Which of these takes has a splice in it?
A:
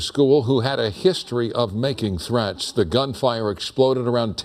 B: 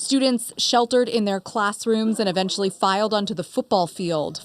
B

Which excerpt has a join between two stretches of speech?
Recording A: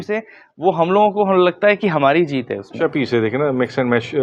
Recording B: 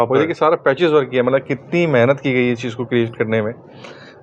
A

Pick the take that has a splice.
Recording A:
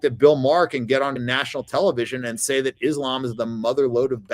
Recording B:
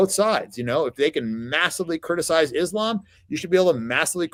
A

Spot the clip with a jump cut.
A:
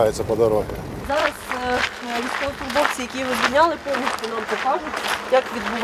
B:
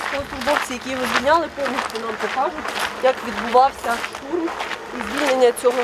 A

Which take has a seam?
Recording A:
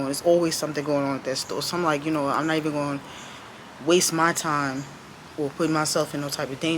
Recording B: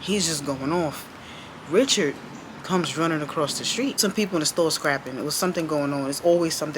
B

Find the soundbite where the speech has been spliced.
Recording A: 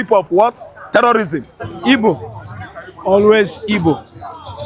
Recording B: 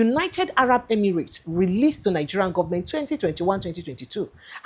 A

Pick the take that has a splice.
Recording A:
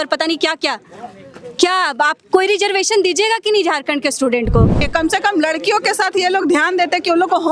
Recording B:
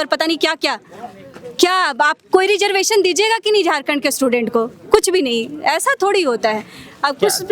A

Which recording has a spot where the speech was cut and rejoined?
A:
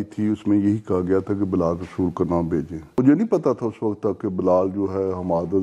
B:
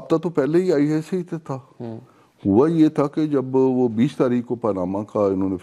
A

